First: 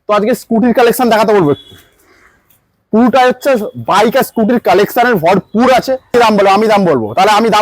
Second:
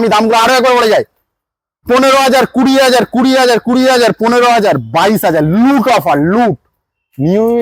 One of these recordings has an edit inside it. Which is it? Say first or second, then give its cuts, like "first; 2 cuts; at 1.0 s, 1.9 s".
first; 1 cut; at 6.1 s